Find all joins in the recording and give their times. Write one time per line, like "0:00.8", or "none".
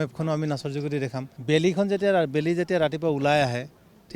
0:01.3